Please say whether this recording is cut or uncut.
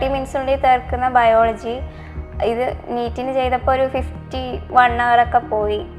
uncut